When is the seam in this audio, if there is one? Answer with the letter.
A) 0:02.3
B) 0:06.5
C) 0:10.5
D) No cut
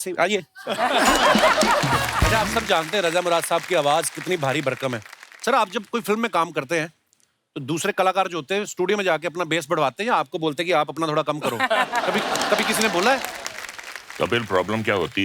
A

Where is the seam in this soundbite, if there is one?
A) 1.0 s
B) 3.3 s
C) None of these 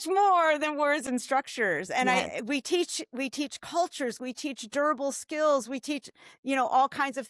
A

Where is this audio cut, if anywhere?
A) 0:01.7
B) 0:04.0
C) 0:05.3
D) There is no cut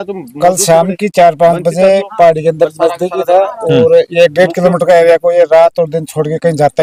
D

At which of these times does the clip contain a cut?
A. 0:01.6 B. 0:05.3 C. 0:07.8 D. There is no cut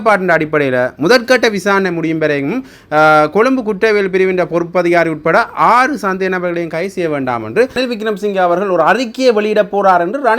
C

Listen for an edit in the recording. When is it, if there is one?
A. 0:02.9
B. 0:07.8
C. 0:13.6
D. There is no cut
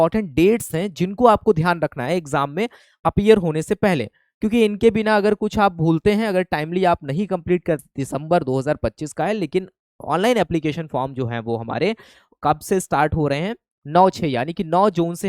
B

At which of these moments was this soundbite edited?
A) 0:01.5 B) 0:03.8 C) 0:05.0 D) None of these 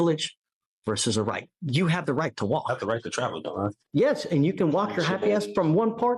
B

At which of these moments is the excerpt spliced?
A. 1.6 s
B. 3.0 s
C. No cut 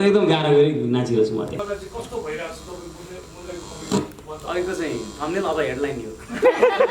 A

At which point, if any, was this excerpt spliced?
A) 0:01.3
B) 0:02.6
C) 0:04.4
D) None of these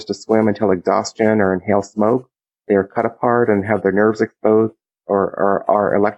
B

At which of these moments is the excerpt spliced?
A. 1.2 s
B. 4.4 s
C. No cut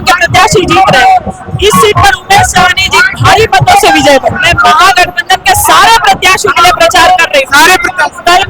B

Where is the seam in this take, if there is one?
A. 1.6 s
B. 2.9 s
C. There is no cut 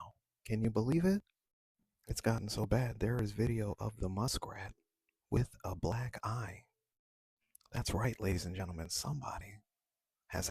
C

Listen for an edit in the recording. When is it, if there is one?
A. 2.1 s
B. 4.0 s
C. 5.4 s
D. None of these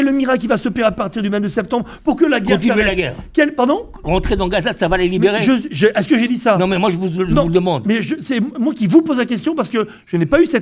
D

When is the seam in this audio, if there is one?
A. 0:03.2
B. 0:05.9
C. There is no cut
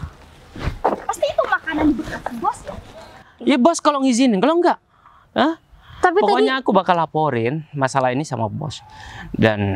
A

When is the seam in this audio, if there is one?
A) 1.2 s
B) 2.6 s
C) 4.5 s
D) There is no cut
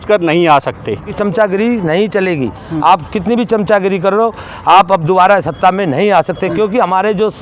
A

